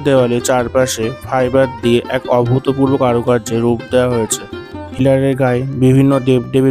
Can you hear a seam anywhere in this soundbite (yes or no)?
yes